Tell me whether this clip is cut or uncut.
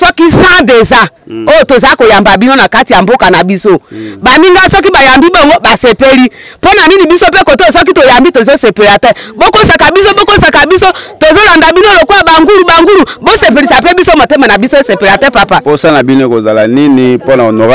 uncut